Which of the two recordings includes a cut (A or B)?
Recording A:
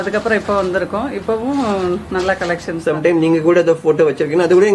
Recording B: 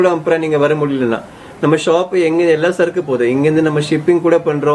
A